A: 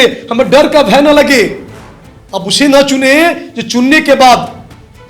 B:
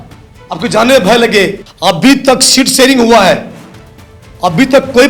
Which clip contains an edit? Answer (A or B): B